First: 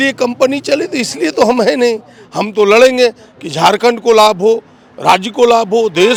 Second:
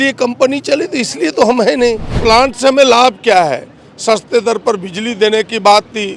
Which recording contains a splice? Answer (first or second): second